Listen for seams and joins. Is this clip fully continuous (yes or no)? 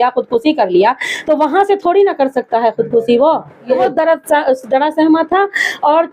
no